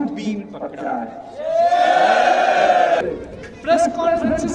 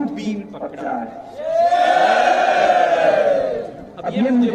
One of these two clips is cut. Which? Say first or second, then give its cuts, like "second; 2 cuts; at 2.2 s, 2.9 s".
first; 1 cut; at 3.0 s